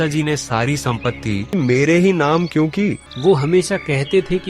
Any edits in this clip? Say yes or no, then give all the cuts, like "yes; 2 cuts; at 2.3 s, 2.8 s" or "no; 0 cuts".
yes; 2 cuts; at 1.5 s, 3.1 s